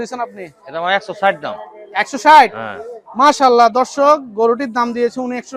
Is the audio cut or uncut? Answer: uncut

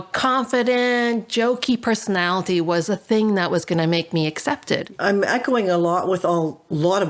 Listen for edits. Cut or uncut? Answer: cut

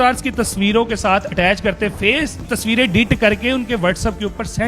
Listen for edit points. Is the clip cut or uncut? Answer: cut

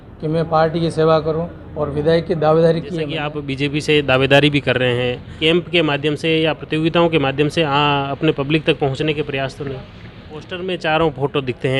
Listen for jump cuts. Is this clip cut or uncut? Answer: cut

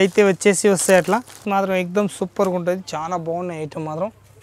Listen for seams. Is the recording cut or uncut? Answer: cut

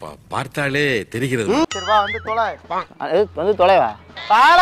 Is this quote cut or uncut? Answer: cut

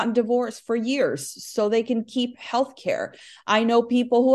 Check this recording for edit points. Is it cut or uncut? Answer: uncut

